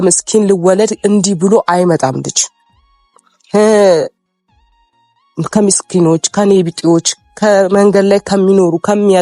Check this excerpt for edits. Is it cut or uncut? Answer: uncut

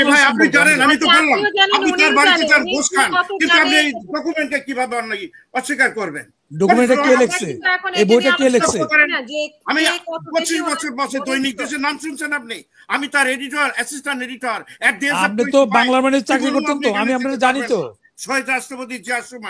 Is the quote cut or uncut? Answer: uncut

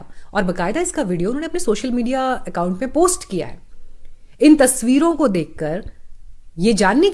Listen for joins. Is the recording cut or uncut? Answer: uncut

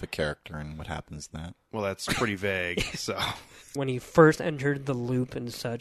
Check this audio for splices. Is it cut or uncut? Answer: cut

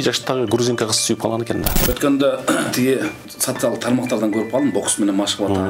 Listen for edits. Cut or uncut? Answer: cut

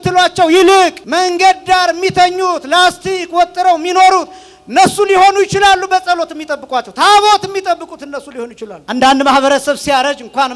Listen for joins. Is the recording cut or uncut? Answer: cut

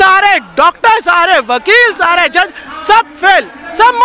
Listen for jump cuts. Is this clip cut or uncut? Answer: uncut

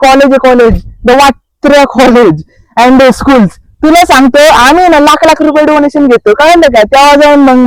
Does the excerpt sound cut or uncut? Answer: uncut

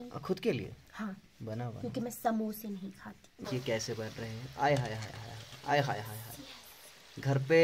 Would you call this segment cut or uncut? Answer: cut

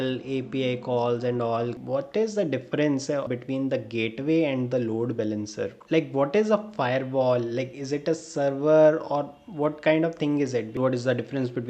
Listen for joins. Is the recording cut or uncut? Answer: cut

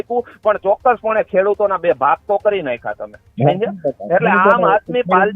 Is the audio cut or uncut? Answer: uncut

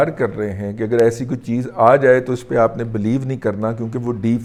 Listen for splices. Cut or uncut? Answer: uncut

